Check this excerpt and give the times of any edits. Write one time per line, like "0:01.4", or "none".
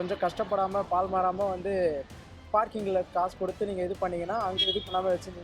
none